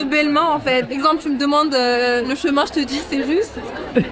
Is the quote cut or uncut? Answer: cut